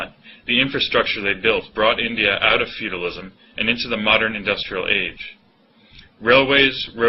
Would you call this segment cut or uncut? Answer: uncut